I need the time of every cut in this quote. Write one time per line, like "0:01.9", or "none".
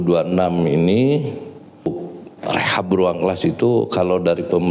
0:01.9